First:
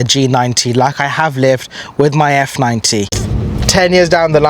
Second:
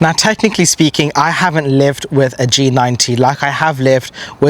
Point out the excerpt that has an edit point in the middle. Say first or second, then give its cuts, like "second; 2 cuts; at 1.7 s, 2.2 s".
first; 1 cut; at 3.2 s